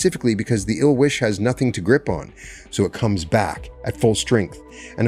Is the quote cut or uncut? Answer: uncut